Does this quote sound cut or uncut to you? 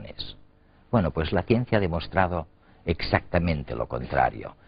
cut